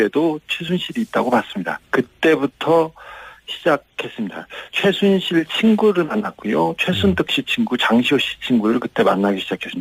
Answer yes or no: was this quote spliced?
no